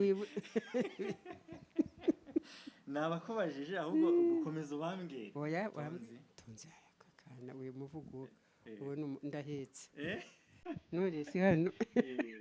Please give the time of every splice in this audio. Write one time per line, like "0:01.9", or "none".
0:05.8